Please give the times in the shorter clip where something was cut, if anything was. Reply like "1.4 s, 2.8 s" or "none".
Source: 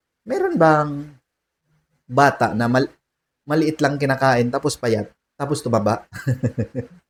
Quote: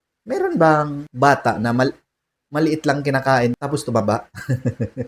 1.0 s, 3.5 s